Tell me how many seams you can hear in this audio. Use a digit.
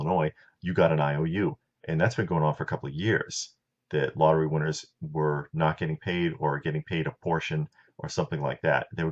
1